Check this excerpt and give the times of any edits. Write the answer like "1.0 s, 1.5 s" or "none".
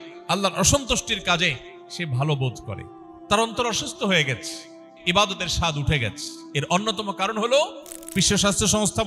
4.9 s, 8.1 s

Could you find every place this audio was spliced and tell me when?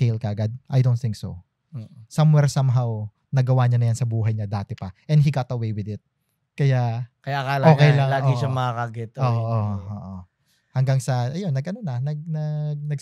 none

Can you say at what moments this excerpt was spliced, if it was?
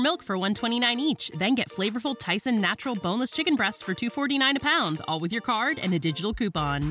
none

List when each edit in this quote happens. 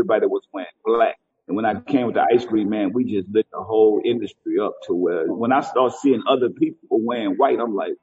1.3 s, 5.4 s

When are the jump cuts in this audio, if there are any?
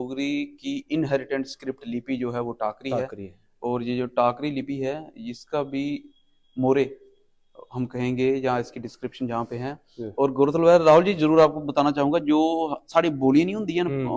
none

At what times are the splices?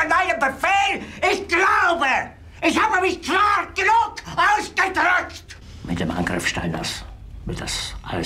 5.8 s

